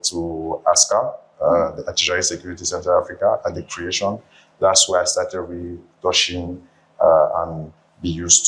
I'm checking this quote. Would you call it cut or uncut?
uncut